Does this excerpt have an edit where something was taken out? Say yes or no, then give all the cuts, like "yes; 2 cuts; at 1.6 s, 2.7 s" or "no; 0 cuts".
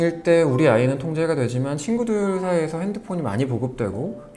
no; 0 cuts